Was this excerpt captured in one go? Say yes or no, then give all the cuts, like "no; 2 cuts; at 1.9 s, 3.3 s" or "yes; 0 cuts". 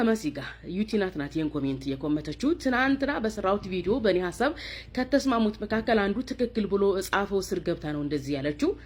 yes; 0 cuts